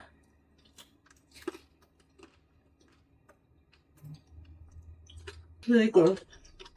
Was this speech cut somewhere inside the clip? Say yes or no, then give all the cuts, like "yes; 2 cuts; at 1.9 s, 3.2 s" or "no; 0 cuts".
no; 0 cuts